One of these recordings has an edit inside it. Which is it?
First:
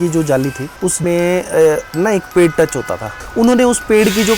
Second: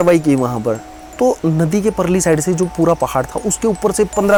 first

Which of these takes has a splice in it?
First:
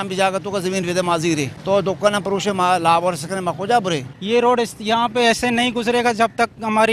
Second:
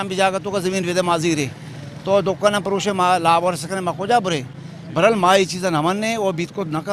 first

